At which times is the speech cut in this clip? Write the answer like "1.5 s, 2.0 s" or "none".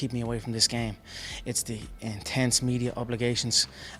none